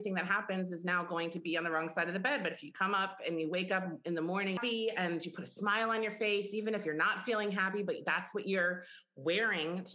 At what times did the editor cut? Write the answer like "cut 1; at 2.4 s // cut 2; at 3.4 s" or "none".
cut 1; at 4.6 s